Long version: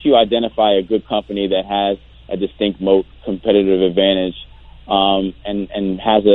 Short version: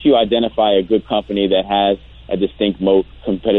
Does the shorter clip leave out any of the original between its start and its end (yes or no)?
no